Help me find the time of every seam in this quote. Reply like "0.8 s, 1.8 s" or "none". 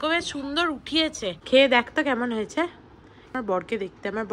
1.4 s, 3.3 s